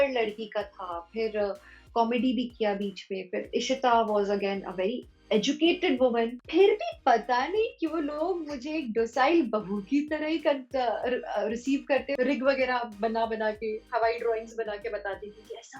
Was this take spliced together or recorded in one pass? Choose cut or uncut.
cut